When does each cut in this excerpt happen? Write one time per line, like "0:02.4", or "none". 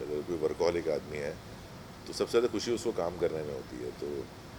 none

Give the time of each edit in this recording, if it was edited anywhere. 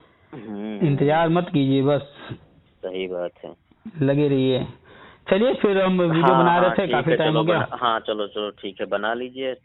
none

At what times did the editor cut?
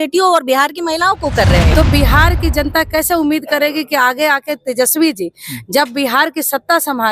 0:01.7

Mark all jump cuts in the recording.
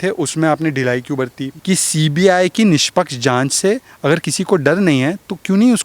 0:01.5

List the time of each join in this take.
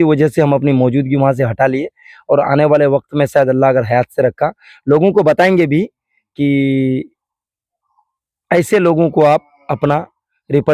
none

